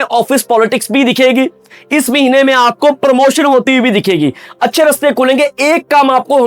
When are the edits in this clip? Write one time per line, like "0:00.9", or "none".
0:04.4